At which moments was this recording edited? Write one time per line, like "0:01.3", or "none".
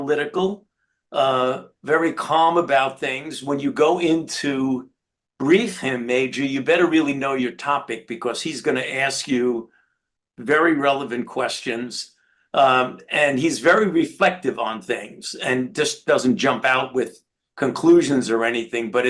none